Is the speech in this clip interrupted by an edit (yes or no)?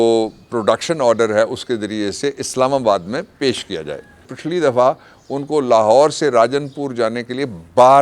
yes